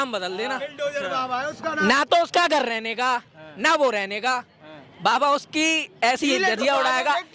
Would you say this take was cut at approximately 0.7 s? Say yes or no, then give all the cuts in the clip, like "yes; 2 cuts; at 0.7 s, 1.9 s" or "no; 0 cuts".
no; 0 cuts